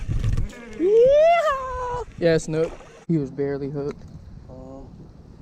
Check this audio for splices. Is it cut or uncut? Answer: cut